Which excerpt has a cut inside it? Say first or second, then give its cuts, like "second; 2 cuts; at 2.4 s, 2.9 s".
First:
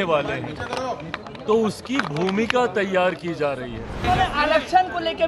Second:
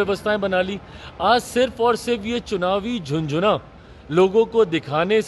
first; 1 cut; at 4.0 s